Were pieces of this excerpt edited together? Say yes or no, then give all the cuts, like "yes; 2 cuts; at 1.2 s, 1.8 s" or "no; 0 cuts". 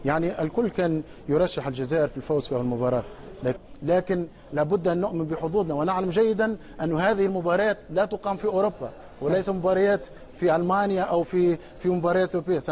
no; 0 cuts